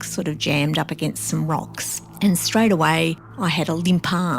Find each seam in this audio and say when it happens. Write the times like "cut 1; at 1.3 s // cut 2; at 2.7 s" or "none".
cut 1; at 3.3 s